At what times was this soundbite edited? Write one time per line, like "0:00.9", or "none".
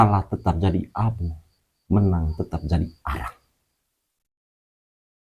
none